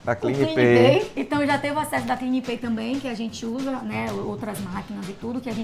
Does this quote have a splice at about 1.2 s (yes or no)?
yes